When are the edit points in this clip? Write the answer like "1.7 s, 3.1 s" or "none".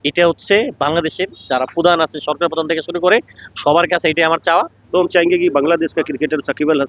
4.7 s